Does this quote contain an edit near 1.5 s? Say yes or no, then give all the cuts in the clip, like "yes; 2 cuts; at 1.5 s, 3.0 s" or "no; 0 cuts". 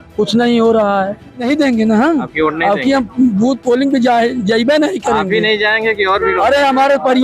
yes; 1 cut; at 1.5 s